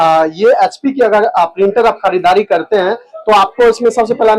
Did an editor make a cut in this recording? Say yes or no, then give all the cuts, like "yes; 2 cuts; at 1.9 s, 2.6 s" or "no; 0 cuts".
no; 0 cuts